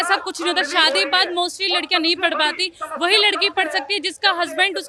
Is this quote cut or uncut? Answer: uncut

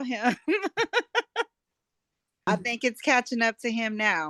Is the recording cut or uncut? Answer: cut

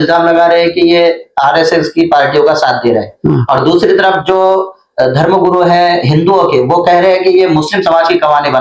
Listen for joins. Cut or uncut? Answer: uncut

